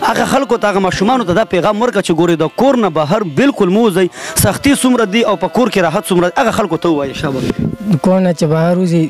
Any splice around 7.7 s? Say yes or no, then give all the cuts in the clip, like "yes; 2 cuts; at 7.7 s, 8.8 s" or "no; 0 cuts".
yes; 1 cut; at 7.7 s